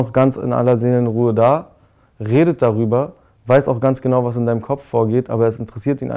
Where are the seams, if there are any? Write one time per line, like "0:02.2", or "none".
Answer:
none